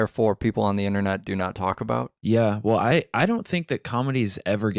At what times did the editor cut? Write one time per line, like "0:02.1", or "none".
0:01.7